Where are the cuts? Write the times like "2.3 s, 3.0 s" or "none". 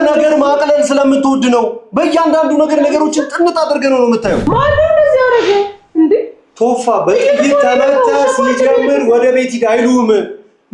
4.4 s